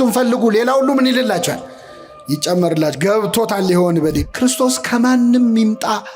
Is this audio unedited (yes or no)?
no